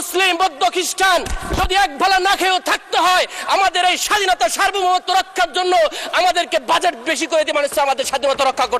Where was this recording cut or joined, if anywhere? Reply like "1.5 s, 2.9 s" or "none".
none

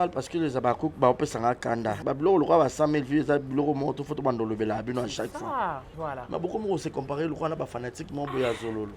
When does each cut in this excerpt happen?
2.0 s, 5.9 s

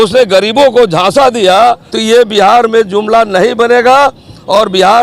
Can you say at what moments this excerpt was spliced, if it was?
1.9 s

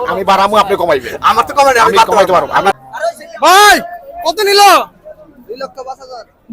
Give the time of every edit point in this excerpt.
2.7 s

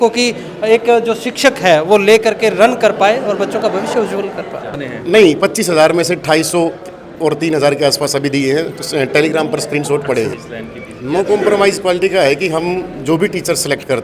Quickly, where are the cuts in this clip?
4.8 s, 10.4 s

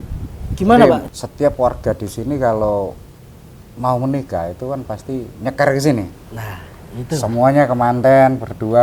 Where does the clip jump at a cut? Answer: 1.0 s

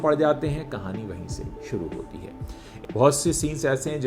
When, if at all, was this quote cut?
2.7 s

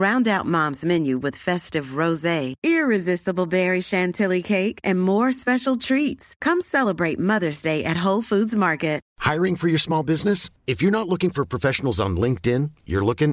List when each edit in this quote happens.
9.1 s

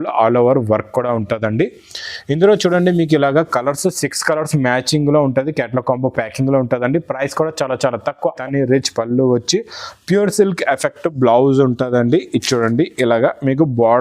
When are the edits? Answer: 8.4 s

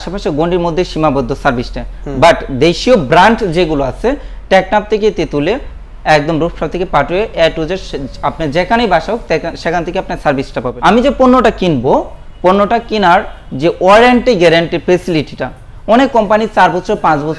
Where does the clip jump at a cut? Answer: 10.7 s

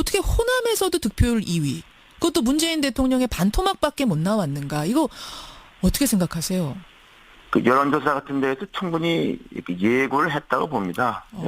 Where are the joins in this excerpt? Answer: 9.7 s

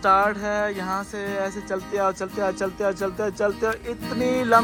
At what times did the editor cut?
none

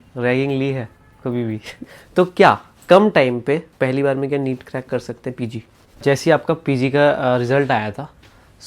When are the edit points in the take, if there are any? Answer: 1.8 s, 3.7 s, 6.0 s

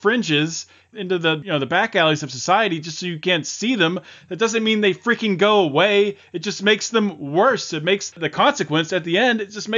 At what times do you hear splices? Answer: 1.1 s

